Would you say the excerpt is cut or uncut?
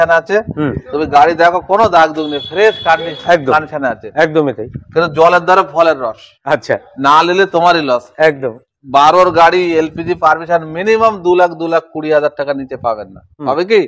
uncut